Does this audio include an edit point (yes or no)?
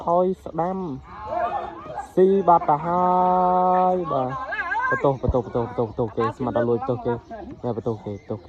no